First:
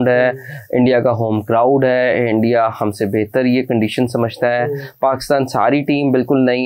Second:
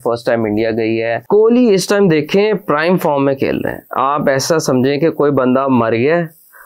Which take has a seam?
second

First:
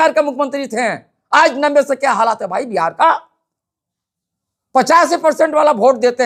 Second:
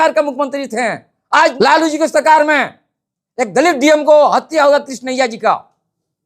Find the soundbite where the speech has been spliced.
second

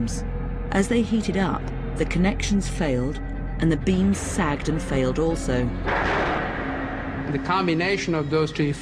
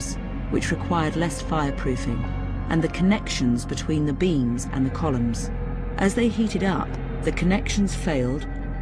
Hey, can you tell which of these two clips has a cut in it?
first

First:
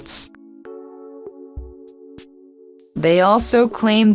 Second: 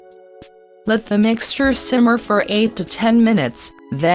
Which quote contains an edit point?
first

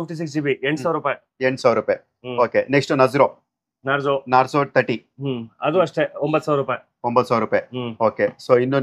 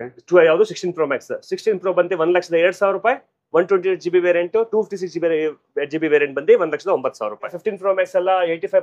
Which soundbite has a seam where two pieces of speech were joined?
second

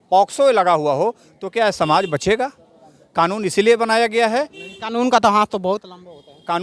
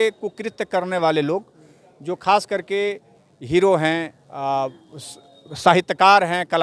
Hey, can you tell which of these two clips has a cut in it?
second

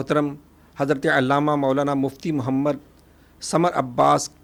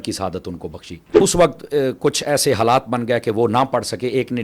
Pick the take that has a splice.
second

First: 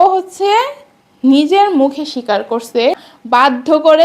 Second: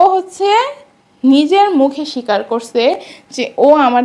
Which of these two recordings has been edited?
first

